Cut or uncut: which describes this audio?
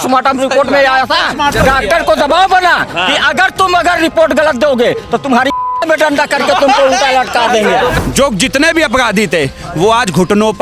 cut